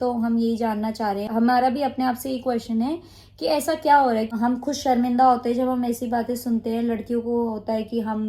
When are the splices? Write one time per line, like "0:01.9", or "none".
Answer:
0:01.3
0:04.3